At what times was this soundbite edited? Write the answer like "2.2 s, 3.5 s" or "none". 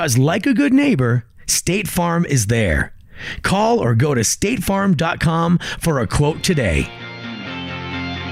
7.2 s